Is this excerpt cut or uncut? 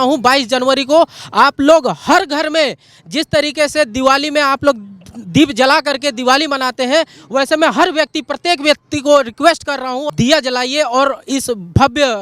cut